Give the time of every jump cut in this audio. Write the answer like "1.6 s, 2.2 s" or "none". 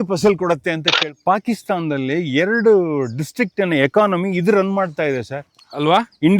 1.0 s